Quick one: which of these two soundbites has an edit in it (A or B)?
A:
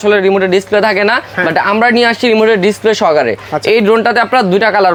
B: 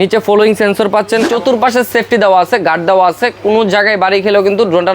B